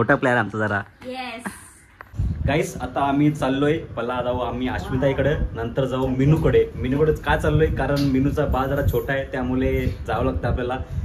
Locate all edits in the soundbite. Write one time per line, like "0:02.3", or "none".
none